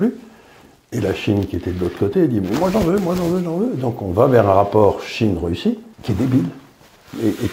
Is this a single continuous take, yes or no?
no